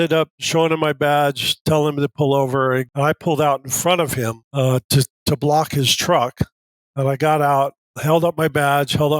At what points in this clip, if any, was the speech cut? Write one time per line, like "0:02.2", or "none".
0:02.9
0:04.4
0:07.9